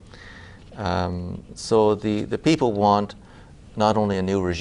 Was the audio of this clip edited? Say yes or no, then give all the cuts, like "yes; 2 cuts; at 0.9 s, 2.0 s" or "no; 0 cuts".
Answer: yes; 1 cut; at 0.9 s